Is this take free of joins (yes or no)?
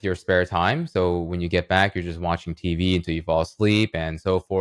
yes